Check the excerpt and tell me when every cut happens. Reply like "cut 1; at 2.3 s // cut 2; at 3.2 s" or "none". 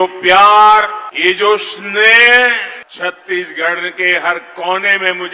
cut 1; at 1.0 s // cut 2; at 2.8 s